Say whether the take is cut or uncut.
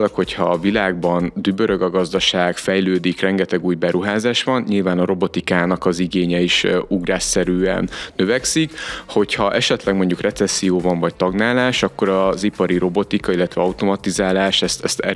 uncut